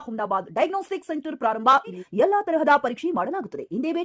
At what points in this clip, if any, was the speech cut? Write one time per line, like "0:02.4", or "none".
0:02.0

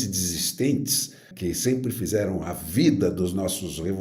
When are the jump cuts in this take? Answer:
0:01.3

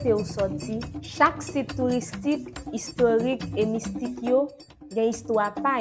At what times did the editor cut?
none

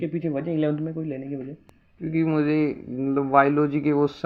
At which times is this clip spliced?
none

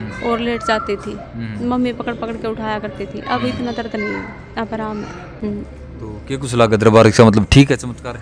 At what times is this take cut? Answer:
none

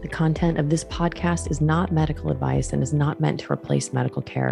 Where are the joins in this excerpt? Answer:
none

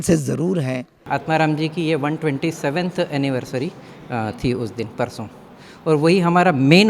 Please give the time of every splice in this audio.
0:01.0

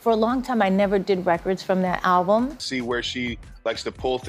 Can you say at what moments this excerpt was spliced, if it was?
0:02.7

